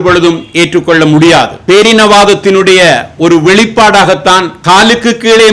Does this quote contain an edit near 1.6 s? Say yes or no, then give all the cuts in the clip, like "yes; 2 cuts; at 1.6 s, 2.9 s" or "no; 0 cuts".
yes; 2 cuts; at 1.6 s, 4.5 s